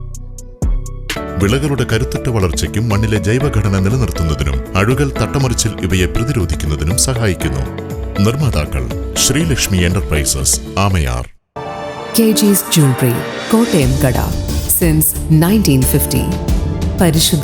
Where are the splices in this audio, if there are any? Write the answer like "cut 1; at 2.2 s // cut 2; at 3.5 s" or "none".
cut 1; at 1.1 s